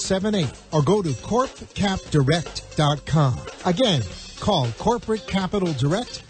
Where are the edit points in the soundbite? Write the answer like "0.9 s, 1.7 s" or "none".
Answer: 3.3 s